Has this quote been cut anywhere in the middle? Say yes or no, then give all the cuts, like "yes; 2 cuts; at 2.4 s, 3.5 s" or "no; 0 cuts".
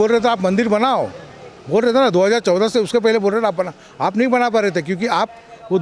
no; 0 cuts